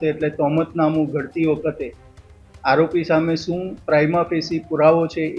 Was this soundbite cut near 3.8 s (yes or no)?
no